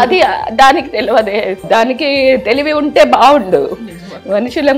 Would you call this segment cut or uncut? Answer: cut